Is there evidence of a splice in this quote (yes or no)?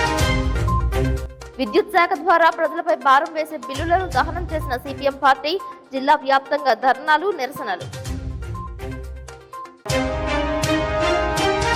no